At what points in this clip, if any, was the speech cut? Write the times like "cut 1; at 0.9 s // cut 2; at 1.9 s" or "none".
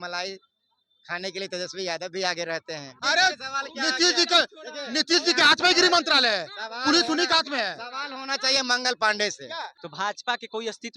cut 1; at 2.9 s // cut 2; at 9.8 s